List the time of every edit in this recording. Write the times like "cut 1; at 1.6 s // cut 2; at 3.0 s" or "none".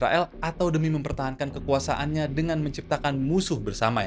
none